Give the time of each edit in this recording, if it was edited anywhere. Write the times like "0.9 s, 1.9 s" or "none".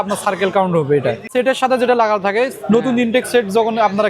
1.3 s